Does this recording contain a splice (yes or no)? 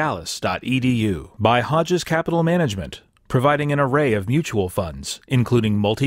yes